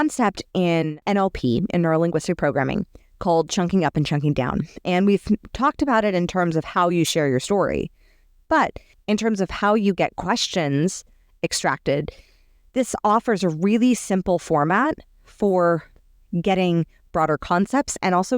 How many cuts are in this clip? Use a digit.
2